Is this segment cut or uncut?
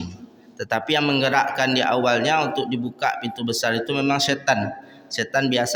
uncut